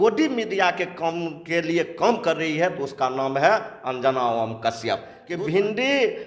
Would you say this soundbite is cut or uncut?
cut